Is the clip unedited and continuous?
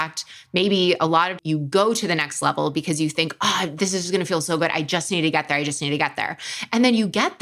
yes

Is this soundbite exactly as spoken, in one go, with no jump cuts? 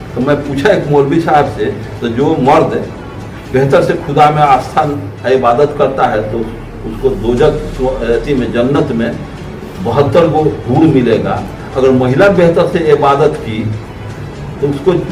yes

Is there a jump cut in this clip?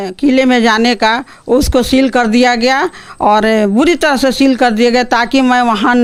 no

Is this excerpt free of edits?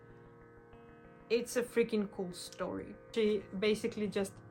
no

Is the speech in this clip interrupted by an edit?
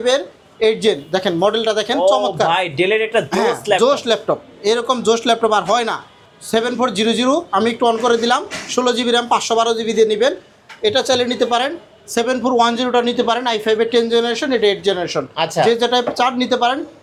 no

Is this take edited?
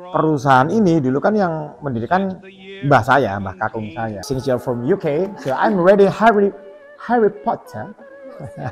yes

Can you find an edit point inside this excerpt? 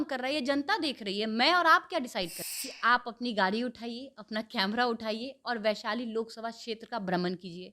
yes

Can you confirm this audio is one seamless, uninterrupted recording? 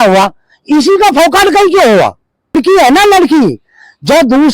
no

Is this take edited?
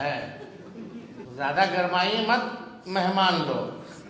yes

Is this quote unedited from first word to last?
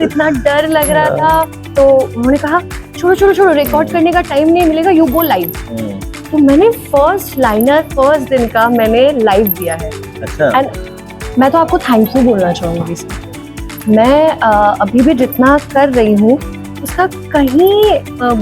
no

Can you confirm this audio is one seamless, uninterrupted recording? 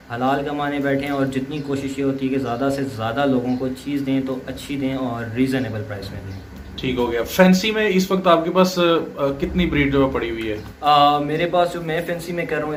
yes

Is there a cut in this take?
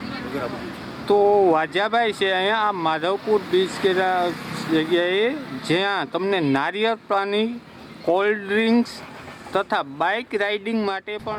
no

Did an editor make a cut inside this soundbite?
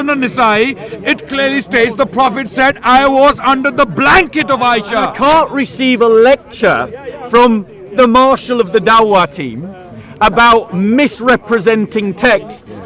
yes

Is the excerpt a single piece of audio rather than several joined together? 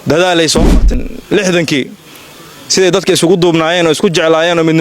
no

